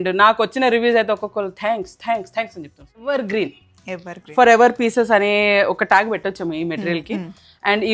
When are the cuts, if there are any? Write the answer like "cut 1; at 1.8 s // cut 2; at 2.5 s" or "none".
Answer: cut 1; at 2.8 s